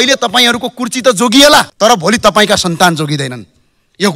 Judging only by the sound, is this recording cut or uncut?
cut